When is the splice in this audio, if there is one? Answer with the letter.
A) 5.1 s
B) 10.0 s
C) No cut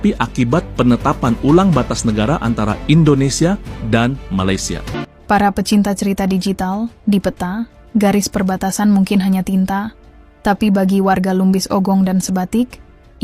A